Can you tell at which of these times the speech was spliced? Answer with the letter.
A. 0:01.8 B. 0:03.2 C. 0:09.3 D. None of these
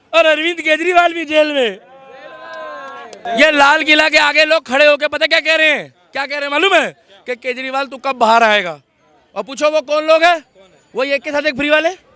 B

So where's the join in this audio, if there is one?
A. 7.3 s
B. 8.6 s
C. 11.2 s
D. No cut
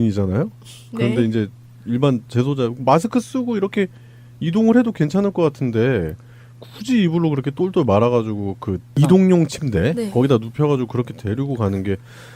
B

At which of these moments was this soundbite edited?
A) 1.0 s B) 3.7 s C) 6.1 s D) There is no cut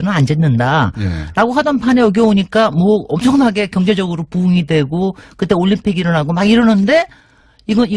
B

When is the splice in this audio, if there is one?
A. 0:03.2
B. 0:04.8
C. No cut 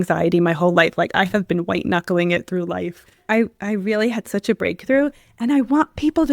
A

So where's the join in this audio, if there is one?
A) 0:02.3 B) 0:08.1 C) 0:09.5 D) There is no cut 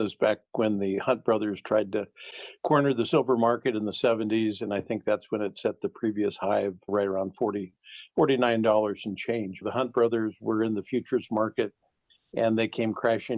C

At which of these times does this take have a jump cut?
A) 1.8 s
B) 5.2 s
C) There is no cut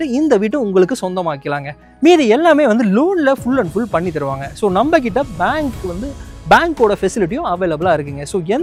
C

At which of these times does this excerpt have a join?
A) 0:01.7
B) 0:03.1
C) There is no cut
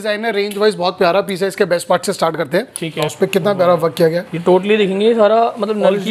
B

